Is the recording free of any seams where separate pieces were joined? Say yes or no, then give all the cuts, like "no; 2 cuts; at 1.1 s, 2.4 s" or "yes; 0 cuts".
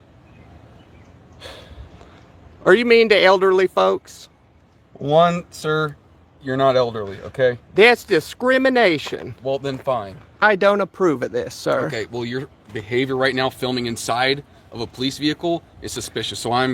no; 1 cut; at 10.4 s